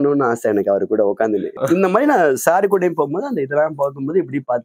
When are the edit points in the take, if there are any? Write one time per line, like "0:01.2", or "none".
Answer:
0:01.6